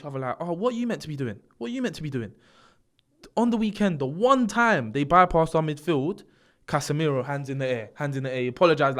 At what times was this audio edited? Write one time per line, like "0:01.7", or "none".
none